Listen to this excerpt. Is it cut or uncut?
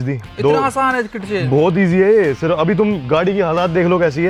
uncut